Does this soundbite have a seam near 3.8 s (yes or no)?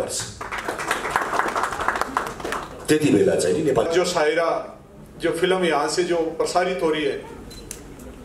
yes